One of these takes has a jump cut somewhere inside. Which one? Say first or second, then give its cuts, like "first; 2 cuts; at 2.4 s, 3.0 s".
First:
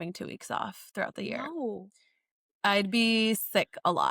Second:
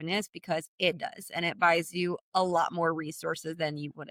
first; 1 cut; at 2.2 s